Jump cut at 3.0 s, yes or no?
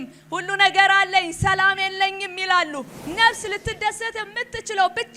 yes